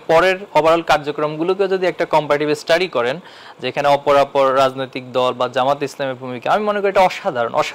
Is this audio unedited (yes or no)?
yes